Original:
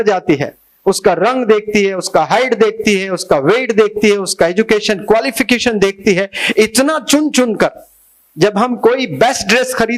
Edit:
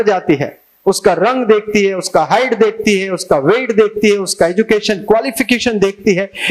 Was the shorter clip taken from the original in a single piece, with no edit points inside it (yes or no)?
yes